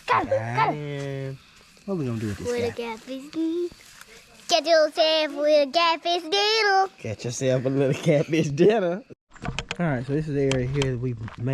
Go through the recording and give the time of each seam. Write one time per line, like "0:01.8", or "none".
0:09.1